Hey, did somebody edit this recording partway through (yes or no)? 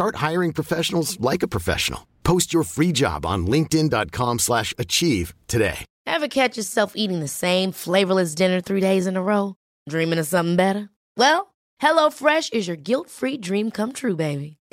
yes